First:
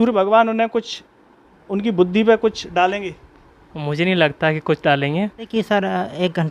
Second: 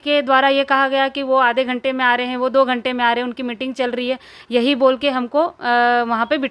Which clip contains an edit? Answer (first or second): first